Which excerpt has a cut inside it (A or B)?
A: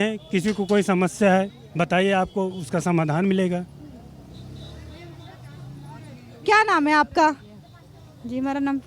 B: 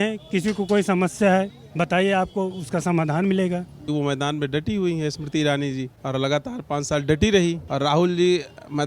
B